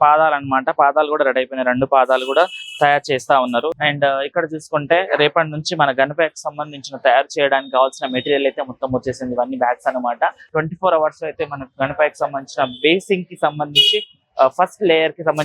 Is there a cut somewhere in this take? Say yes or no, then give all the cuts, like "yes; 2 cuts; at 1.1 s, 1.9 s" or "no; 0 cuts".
yes; 2 cuts; at 3.7 s, 10.5 s